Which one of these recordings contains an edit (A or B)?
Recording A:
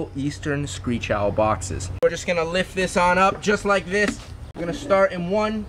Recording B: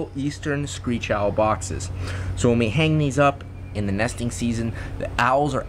A